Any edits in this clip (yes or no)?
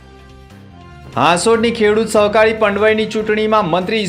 yes